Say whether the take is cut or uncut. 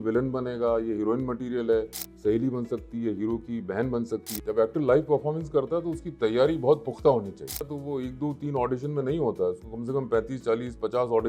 cut